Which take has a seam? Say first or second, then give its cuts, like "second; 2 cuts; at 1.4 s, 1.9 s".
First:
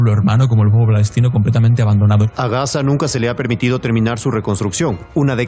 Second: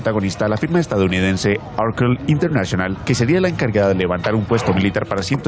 first; 1 cut; at 2.3 s